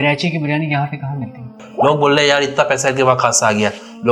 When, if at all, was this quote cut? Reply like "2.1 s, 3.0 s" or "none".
1.6 s